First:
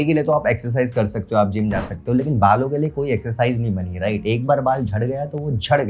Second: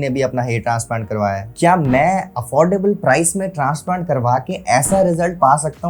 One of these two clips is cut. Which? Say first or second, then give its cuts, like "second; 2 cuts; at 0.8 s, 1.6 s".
second; 1 cut; at 1.5 s